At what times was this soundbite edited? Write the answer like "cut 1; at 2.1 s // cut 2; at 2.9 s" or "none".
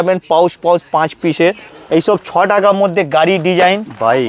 cut 1; at 1.7 s